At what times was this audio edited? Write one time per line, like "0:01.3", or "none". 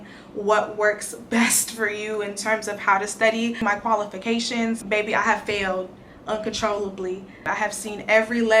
0:03.6
0:04.8
0:07.4